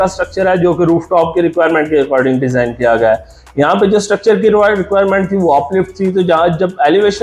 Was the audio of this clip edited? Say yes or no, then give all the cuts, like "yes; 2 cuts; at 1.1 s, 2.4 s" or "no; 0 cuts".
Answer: no; 0 cuts